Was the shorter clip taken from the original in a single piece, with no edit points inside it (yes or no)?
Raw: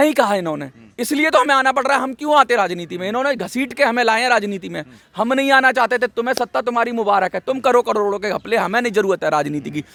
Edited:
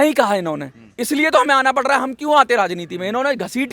yes